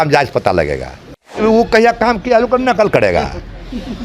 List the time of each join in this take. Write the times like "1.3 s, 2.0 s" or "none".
1.4 s